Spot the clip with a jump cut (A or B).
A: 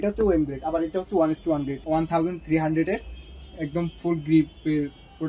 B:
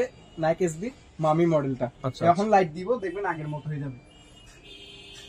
A